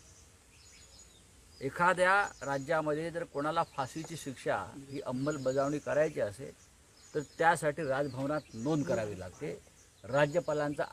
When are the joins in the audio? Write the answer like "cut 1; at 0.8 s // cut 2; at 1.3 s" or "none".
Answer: none